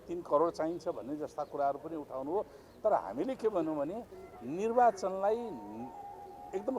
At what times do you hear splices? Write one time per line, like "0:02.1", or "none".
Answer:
none